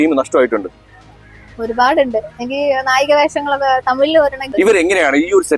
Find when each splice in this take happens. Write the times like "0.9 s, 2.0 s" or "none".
4.4 s